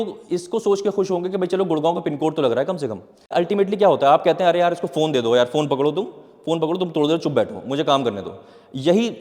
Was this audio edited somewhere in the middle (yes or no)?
yes